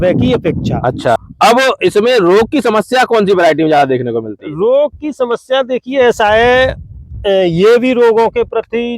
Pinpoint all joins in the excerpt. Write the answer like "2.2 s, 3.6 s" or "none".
1.2 s